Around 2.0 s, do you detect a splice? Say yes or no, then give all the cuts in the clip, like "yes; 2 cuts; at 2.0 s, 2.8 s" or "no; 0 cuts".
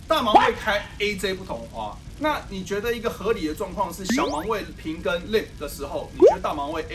no; 0 cuts